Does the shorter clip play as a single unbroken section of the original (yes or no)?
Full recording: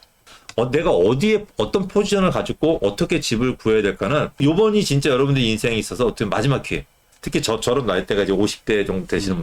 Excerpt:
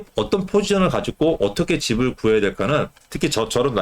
no